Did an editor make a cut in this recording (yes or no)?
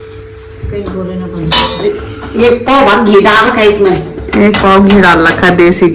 yes